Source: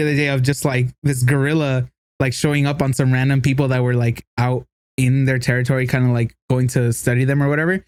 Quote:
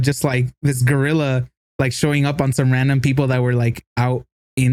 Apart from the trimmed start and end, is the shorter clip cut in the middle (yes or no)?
no